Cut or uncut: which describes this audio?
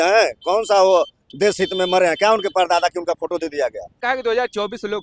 cut